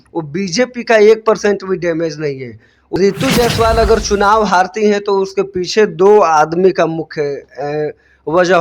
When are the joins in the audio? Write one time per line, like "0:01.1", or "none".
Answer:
0:03.0